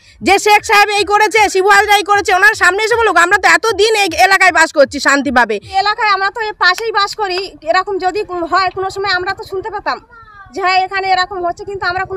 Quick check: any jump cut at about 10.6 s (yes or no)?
no